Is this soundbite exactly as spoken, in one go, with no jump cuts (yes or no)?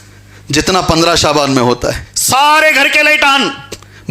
no